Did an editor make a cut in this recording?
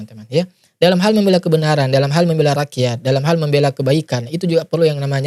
no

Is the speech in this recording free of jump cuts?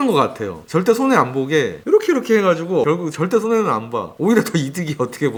yes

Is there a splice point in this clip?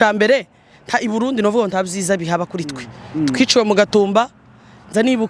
no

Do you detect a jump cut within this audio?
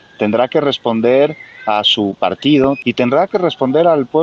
yes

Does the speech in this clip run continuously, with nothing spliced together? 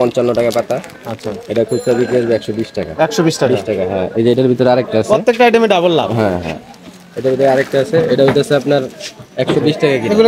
yes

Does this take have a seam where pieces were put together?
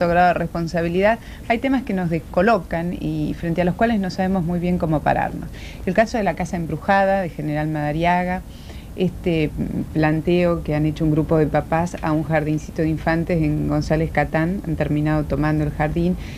no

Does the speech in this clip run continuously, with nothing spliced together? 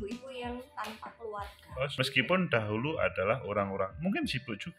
no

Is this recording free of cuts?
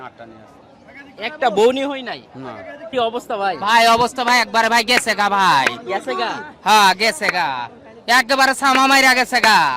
no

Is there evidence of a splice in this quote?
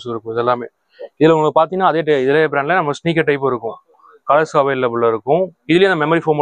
no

